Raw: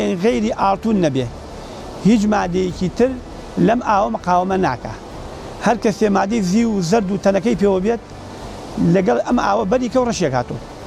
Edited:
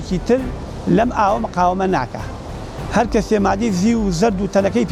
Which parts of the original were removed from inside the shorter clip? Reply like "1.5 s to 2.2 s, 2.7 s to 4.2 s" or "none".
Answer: none